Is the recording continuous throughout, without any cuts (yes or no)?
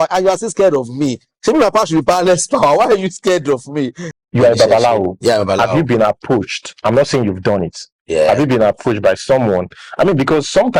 no